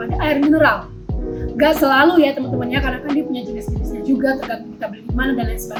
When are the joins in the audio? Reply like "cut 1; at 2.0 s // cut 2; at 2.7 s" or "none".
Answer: none

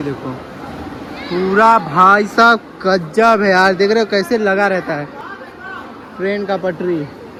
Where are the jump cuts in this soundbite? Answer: none

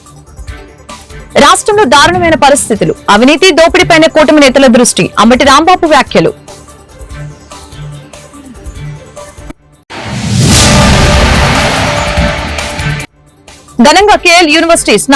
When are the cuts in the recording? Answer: cut 1; at 0.9 s

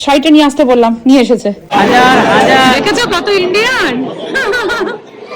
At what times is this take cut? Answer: cut 1; at 1.6 s

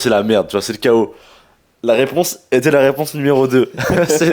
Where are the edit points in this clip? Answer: none

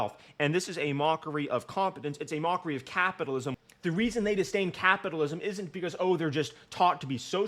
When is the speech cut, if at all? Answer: cut 1; at 3.6 s

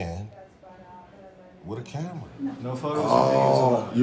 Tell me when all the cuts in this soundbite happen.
cut 1; at 2.2 s

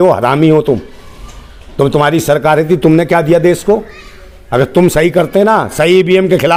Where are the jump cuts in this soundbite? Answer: none

